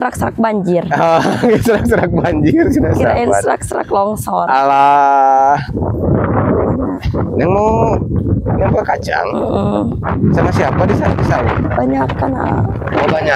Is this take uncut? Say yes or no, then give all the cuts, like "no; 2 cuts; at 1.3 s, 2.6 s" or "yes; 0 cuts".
yes; 0 cuts